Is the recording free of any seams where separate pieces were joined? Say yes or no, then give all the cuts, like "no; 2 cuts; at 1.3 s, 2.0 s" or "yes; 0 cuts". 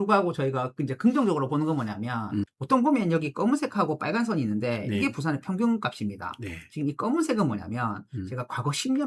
no; 1 cut; at 2.5 s